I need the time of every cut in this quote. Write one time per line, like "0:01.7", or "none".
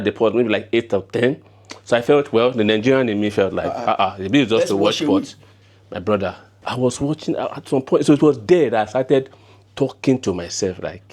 0:06.6

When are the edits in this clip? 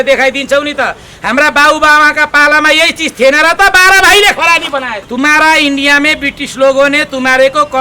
0:05.0

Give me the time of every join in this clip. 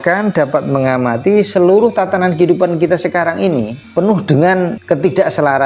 0:03.8
0:04.8

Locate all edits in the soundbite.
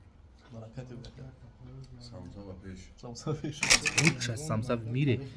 0:03.8

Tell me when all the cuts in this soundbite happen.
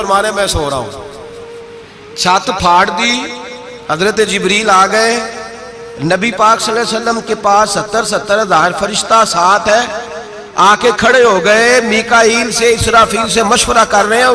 none

